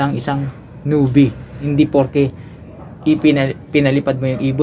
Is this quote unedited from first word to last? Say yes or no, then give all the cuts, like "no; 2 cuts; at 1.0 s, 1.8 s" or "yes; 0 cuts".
no; 1 cut; at 1.5 s